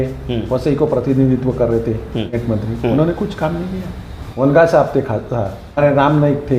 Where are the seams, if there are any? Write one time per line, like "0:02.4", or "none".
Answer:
0:02.4
0:04.4
0:05.8